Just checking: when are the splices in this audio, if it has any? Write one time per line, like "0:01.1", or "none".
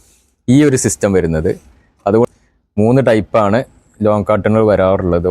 0:02.3